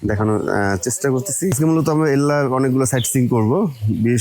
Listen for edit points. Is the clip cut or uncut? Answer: cut